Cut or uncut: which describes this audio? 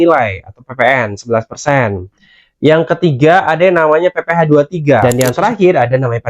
cut